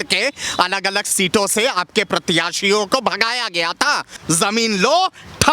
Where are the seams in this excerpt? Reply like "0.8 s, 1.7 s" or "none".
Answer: 4.2 s